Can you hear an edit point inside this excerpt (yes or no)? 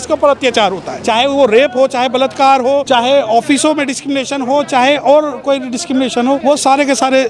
yes